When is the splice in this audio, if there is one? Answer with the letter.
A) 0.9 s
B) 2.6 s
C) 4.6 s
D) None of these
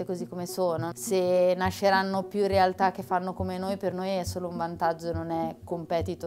A